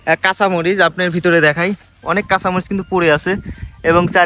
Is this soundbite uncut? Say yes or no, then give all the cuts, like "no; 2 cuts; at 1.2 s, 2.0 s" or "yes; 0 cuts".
yes; 0 cuts